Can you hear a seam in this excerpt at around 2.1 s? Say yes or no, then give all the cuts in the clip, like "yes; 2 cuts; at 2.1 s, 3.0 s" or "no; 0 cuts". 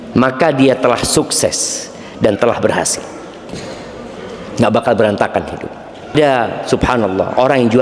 no; 1 cut; at 6.1 s